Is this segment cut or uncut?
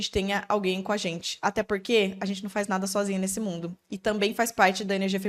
uncut